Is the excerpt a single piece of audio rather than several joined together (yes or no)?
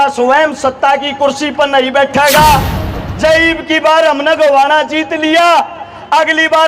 no